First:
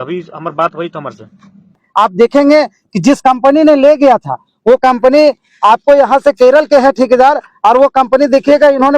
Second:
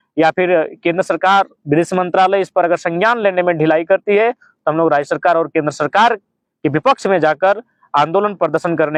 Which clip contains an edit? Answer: first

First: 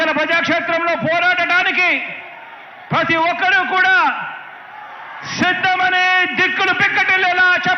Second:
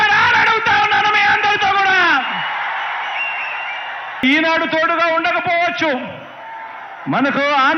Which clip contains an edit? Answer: second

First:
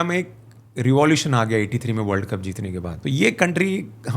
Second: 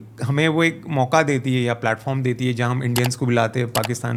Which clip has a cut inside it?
first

